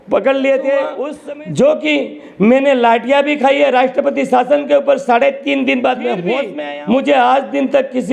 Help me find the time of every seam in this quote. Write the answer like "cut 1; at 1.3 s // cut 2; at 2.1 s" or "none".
cut 1; at 1.1 s // cut 2; at 6.5 s